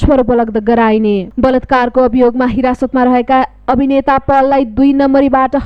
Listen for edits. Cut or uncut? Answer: cut